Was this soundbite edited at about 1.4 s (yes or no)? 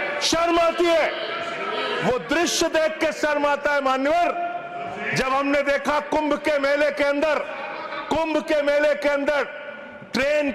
no